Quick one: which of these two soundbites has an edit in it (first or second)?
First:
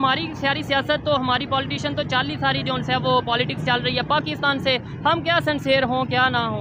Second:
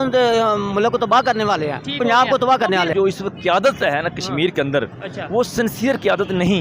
second